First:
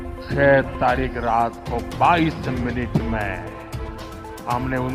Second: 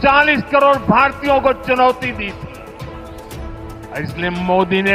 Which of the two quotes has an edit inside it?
second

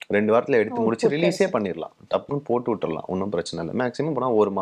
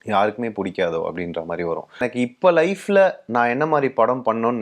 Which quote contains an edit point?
second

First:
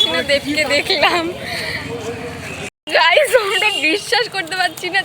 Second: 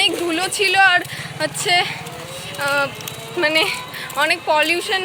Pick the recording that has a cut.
first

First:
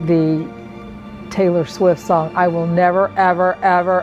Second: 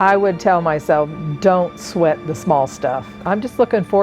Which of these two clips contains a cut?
second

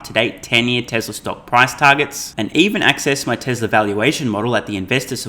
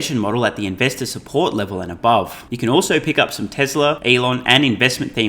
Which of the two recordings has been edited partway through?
second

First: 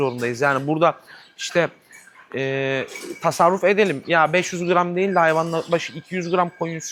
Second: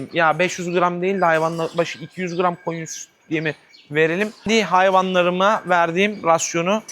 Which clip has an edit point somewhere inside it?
second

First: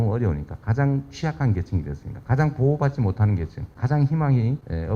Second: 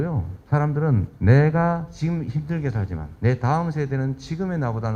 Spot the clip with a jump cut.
second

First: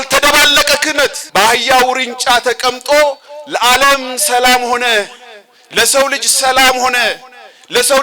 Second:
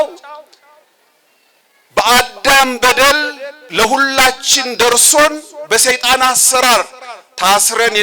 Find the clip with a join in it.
first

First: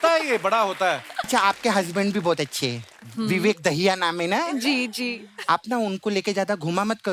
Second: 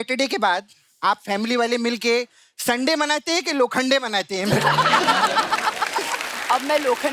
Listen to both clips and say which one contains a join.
first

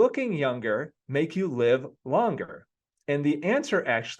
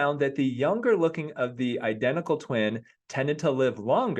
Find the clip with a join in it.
first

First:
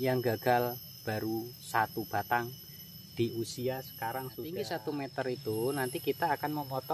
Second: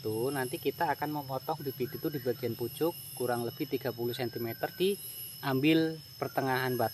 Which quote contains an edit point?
first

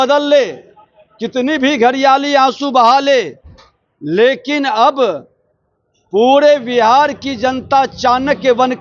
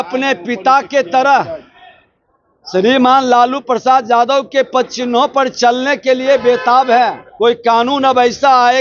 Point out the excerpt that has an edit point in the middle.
second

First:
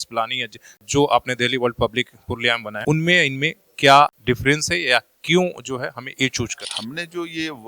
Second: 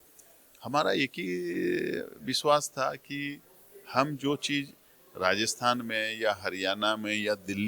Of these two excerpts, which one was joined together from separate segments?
first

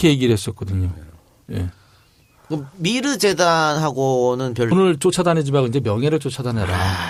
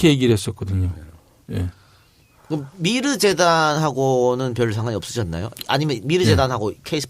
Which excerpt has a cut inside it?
second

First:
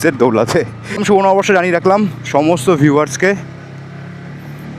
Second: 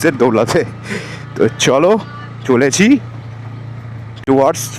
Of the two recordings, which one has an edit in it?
first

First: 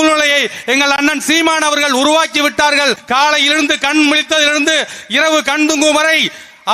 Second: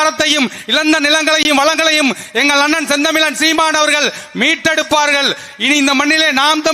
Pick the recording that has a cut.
first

